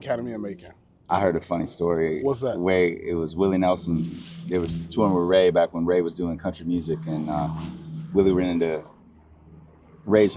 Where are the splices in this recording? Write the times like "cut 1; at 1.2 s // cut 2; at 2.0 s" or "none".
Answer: cut 1; at 1.1 s